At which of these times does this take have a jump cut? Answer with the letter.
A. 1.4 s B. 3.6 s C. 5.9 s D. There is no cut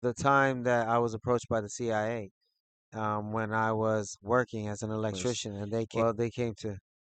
C